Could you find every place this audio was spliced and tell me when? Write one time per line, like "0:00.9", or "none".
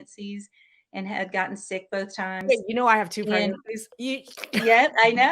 none